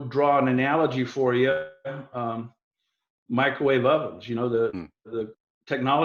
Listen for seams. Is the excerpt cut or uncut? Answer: uncut